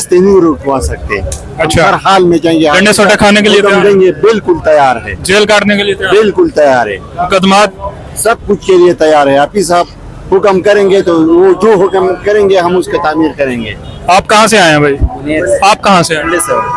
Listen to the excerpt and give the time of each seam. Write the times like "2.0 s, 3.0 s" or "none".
none